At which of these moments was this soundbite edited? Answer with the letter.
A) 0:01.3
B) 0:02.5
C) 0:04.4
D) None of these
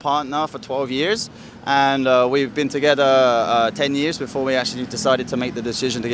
D